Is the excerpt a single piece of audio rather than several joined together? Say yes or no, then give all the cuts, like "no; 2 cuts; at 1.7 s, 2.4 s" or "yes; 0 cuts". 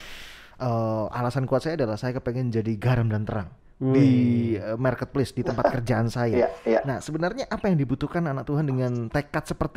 yes; 0 cuts